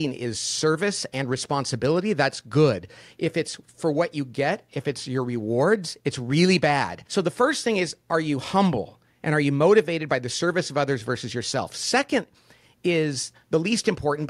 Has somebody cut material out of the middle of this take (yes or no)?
yes